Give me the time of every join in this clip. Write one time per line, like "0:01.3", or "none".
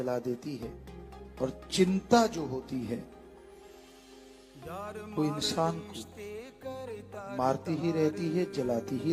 none